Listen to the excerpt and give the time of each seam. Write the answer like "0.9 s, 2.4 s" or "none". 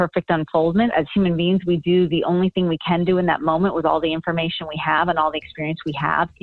none